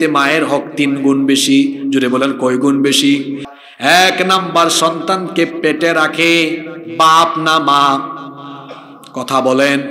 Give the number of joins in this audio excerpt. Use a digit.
1